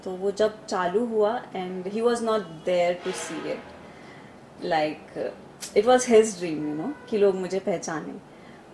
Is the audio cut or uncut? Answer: uncut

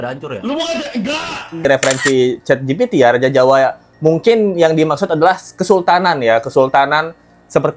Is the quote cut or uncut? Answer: cut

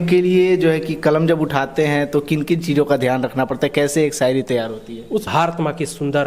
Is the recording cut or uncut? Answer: cut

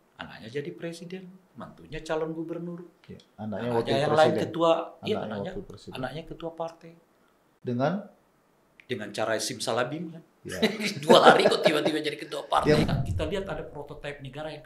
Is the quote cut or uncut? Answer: cut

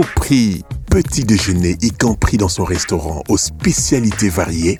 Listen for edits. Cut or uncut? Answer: uncut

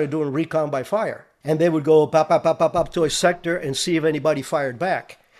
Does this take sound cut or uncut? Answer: cut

